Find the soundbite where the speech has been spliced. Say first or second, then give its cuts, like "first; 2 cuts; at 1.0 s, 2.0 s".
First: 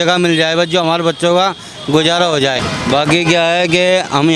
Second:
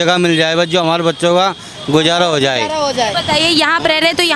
first; 1 cut; at 2.6 s